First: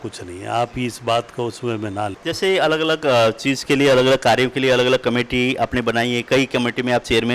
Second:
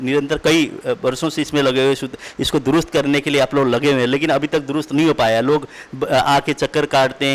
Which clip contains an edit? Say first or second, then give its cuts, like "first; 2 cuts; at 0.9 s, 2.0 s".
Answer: first; 1 cut; at 2.2 s